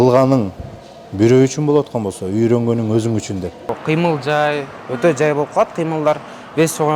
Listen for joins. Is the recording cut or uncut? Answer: cut